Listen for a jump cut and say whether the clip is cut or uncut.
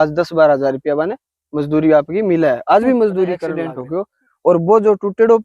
cut